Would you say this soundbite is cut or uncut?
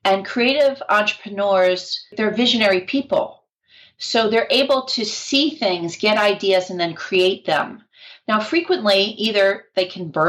cut